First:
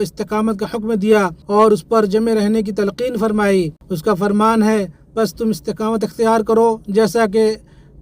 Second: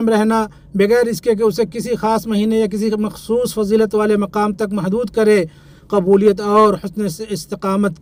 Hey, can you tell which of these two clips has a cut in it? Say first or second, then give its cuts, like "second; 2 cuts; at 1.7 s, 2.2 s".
first; 2 cuts; at 1.4 s, 3.8 s